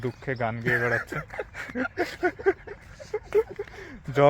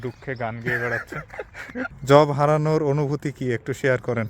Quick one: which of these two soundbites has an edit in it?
second; 1 cut; at 1.9 s

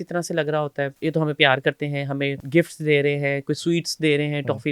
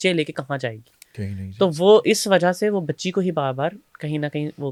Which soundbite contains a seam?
first; 2 cuts; at 0.9 s, 2.4 s

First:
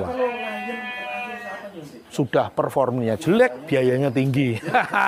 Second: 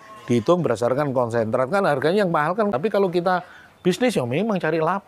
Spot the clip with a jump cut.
second; 1 cut; at 2.7 s

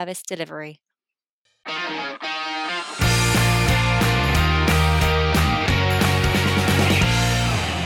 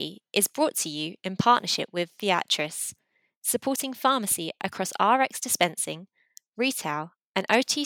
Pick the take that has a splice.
first; 1 cut; at 1.2 s

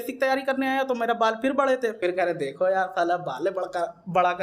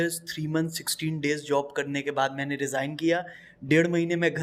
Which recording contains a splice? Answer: first; 1 cut; at 2.0 s

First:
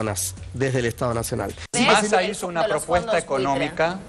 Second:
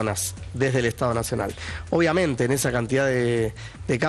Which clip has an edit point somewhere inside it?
first; 1 cut; at 1.6 s

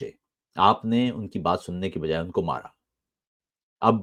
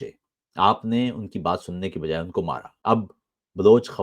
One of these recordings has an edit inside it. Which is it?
second; 1 cut; at 2.7 s

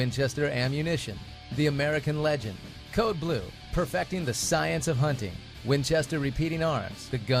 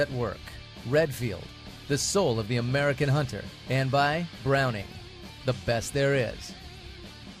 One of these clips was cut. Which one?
second; 1 cut; at 6.4 s

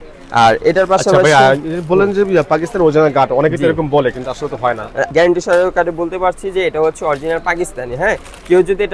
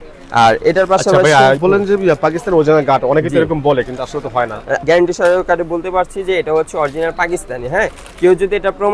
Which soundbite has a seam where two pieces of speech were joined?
second; 1 cut; at 1.6 s

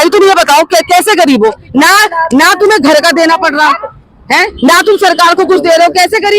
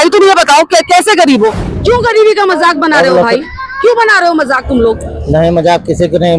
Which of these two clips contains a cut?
second; 1 cut; at 1.6 s

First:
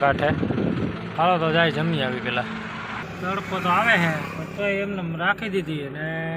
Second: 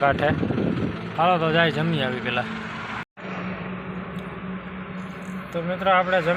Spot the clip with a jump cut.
first; 1 cut; at 3.1 s

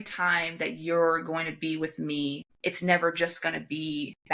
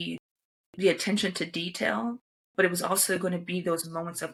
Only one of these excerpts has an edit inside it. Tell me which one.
first; 1 cut; at 2.5 s

